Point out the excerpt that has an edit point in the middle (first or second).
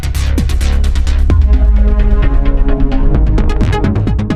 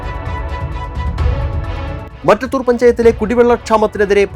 second